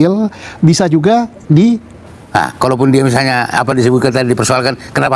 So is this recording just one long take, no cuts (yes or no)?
no